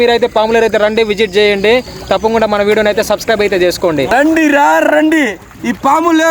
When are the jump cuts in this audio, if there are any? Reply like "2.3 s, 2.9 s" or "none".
4.1 s